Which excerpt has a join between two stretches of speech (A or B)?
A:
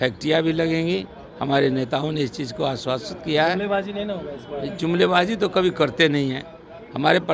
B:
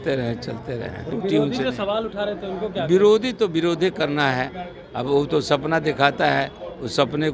B